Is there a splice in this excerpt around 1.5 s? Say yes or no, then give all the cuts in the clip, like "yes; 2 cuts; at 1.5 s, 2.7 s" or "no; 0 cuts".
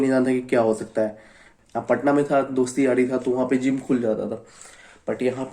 yes; 1 cut; at 1.5 s